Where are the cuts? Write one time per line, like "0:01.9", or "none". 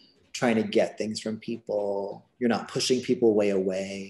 none